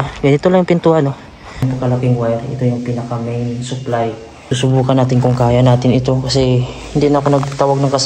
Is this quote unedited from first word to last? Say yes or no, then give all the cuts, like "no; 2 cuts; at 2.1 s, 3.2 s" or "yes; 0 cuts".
no; 2 cuts; at 1.6 s, 4.4 s